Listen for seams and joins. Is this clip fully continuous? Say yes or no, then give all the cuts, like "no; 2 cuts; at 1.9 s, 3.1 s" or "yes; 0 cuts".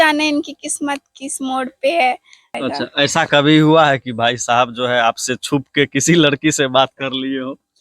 no; 1 cut; at 2.5 s